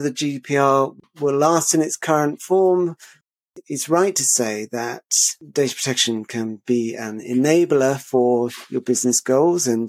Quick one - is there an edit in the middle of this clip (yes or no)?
yes